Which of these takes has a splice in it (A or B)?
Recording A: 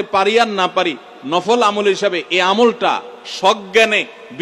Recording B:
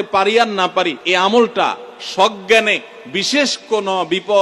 B